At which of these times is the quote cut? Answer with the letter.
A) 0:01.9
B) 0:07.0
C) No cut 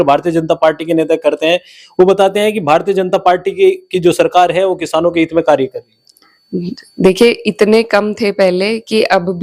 C